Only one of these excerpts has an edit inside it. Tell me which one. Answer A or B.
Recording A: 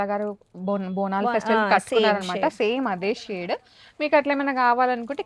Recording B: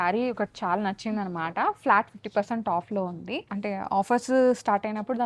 B